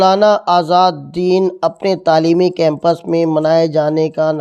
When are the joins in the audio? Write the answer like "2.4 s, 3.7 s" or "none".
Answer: none